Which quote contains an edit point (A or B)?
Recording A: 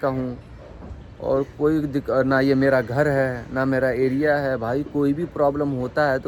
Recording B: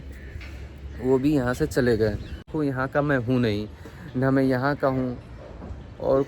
B